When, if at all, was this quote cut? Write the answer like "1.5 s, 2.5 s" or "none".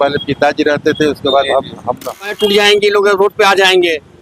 2.3 s